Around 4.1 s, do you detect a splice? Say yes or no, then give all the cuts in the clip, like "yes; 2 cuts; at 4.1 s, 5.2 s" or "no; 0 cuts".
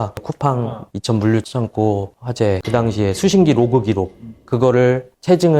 no; 1 cut; at 2.6 s